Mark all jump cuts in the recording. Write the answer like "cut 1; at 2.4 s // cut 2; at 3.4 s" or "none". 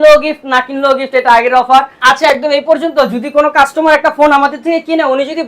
cut 1; at 1.9 s

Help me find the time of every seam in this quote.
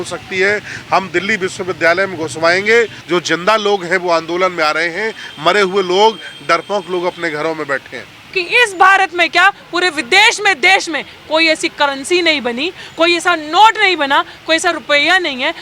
cut 1; at 3.0 s // cut 2; at 8.3 s

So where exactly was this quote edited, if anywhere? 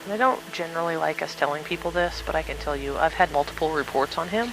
cut 1; at 3.3 s

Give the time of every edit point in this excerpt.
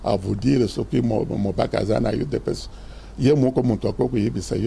none

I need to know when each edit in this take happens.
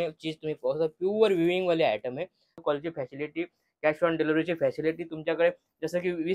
cut 1; at 2.6 s

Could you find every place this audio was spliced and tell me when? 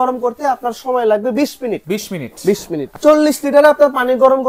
none

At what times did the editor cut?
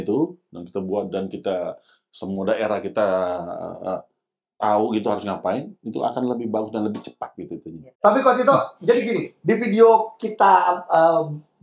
cut 1; at 7.9 s

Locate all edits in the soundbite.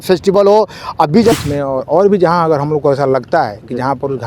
cut 1; at 1.3 s

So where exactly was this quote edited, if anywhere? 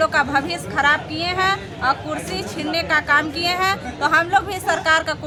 none

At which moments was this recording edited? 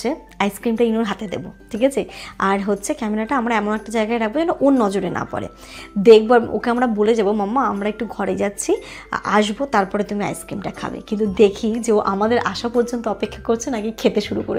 none

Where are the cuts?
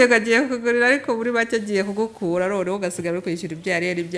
none

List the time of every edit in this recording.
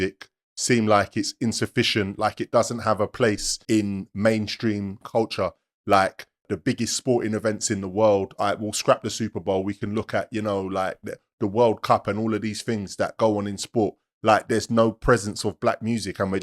cut 1; at 3.5 s // cut 2; at 5.0 s // cut 3; at 6.5 s

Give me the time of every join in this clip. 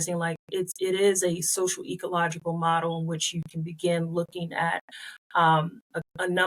none

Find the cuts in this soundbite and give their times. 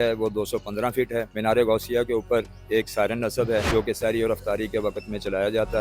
cut 1; at 1.3 s // cut 2; at 3.7 s

